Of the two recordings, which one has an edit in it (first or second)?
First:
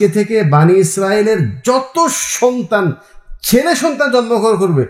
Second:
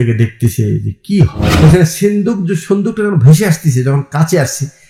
second